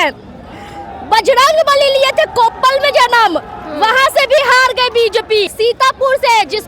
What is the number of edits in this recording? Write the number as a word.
one